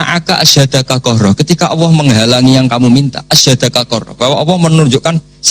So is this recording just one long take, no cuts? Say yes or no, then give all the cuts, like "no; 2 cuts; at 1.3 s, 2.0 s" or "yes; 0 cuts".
yes; 0 cuts